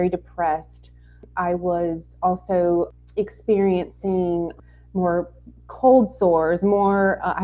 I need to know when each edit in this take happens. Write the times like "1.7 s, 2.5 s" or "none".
1.2 s, 3.0 s, 4.6 s